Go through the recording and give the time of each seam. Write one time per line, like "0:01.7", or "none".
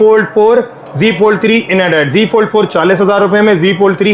none